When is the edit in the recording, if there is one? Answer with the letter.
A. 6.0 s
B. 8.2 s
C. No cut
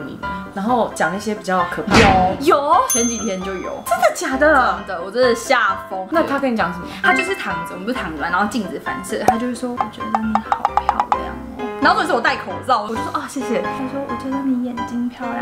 A